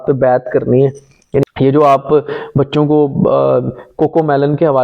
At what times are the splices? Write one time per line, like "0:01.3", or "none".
0:01.4